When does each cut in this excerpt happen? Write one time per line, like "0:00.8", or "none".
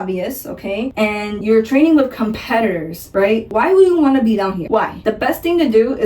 0:01.3
0:04.9